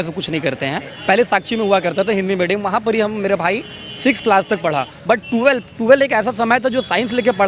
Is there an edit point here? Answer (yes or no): yes